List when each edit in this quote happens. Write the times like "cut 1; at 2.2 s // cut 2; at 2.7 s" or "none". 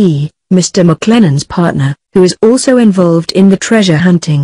cut 1; at 3.5 s